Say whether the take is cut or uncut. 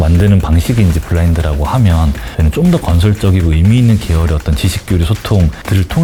uncut